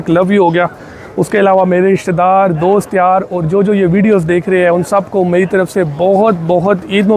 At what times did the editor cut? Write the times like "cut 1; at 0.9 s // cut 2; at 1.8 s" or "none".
none

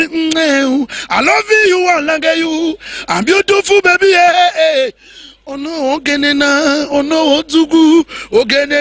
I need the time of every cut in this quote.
none

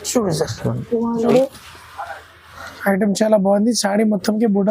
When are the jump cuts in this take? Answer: cut 1; at 1.2 s

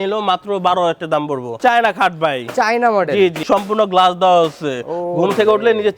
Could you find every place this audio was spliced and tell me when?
cut 1; at 1.6 s // cut 2; at 3.4 s

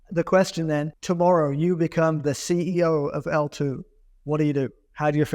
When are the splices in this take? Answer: cut 1; at 0.9 s

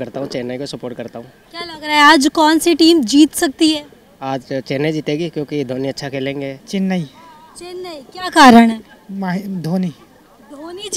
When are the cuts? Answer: none

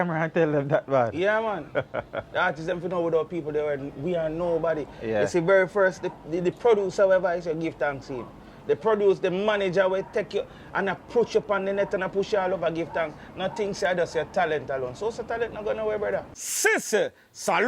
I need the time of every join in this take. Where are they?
cut 1; at 16.4 s

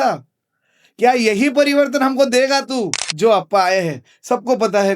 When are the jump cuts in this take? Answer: cut 1; at 3.0 s

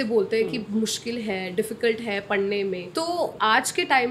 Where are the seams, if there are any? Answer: cut 1; at 3.2 s

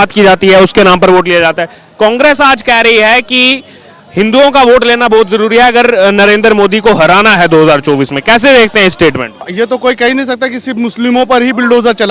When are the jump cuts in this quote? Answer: cut 1; at 9.5 s

